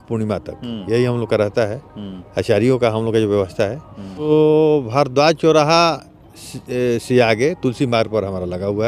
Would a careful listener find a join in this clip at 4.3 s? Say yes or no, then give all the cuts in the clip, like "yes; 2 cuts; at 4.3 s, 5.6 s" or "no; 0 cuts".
yes; 1 cut; at 4.3 s